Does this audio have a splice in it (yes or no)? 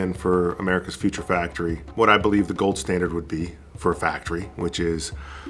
no